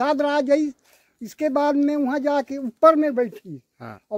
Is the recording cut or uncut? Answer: uncut